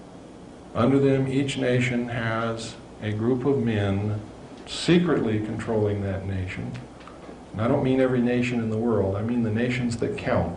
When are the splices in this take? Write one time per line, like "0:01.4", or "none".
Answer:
0:07.2